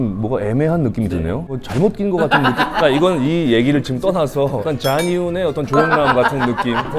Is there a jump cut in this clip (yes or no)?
yes